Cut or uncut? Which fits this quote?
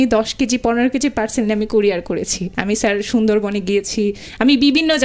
cut